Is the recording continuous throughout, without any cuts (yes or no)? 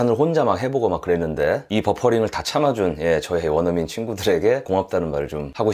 no